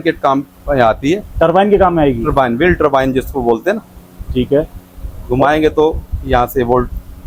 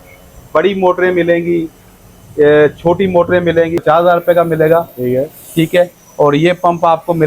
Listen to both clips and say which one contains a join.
second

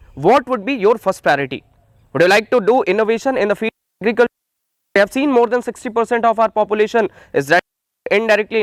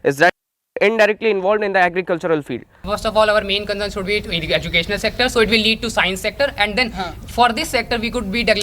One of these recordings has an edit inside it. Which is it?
second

